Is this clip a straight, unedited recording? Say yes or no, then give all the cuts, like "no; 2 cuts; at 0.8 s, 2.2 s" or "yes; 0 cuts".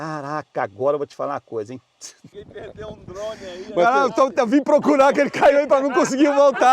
no; 1 cut; at 2.3 s